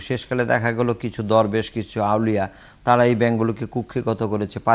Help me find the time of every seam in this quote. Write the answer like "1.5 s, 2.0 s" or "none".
none